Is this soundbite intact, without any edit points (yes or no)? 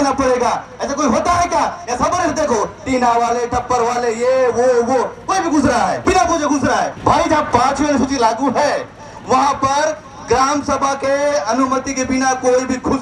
yes